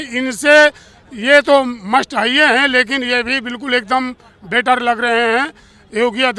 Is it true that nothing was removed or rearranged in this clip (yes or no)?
yes